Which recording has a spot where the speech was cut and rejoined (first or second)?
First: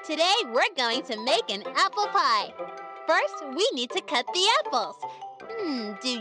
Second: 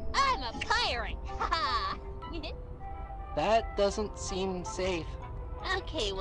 first